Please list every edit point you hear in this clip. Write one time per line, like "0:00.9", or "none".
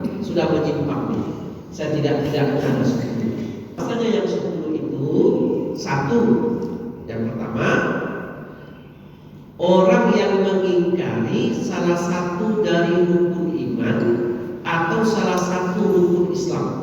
0:03.8